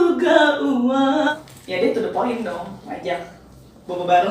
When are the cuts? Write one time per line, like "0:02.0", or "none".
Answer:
0:01.3